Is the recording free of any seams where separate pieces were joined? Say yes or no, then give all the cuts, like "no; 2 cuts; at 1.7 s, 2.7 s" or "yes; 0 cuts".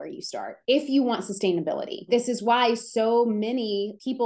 no; 1 cut; at 2.1 s